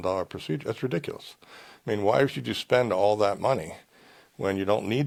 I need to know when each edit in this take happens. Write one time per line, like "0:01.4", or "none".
none